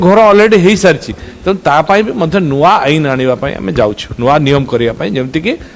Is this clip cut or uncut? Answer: uncut